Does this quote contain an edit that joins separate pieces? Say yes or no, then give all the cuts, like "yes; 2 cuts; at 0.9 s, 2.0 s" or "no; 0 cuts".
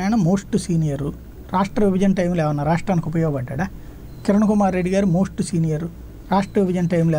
no; 0 cuts